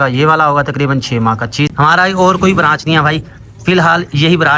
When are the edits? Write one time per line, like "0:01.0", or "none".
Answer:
0:01.7

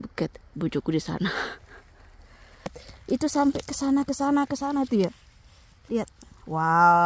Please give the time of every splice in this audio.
0:02.9

